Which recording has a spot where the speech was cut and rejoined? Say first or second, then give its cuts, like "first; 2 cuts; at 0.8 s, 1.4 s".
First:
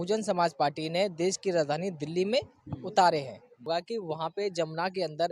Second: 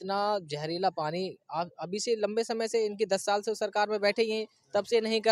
first; 1 cut; at 3.7 s